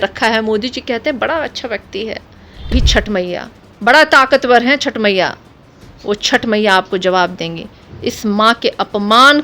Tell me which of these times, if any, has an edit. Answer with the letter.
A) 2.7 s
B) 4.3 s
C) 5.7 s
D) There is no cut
A